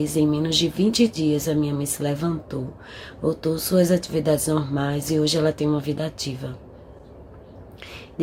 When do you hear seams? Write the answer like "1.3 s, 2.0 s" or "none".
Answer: none